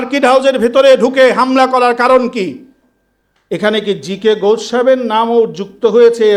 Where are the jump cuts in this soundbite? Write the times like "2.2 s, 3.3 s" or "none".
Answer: none